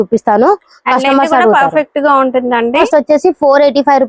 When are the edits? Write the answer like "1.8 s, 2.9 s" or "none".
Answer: 2.8 s